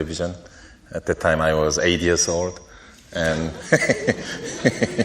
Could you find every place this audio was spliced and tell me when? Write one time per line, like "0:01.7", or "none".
none